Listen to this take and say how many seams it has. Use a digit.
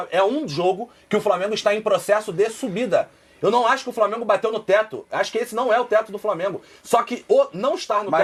0